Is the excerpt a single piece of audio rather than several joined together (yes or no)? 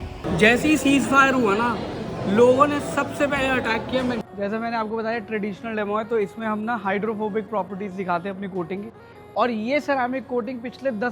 no